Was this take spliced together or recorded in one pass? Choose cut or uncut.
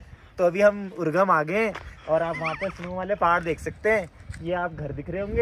uncut